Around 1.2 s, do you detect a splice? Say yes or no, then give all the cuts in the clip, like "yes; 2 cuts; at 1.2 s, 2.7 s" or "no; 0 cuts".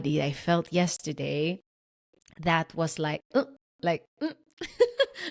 no; 0 cuts